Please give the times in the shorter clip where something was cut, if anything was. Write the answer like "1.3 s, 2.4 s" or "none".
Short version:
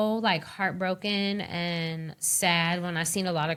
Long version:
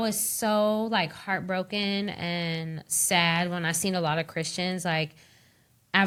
none